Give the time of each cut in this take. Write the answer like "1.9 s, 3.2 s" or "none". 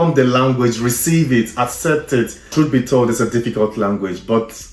2.4 s